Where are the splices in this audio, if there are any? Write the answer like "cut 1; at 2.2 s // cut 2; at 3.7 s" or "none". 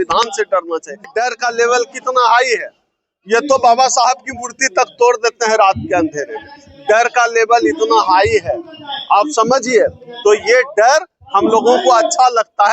cut 1; at 1.1 s